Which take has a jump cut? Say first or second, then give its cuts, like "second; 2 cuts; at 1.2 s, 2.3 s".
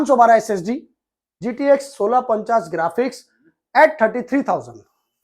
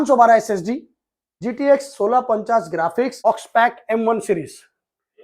second; 1 cut; at 3.2 s